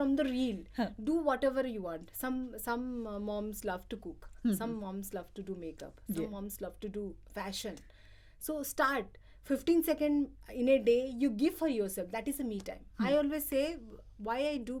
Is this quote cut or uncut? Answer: uncut